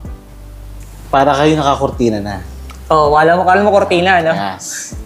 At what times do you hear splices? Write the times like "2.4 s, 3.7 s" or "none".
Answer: none